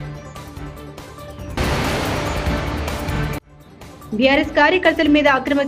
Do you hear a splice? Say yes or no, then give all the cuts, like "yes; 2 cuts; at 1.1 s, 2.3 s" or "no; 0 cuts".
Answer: no; 0 cuts